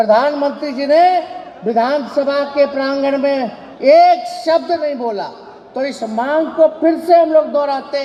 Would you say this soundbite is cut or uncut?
uncut